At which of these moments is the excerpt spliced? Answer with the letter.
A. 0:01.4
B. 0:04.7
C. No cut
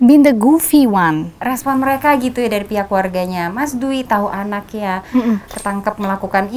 A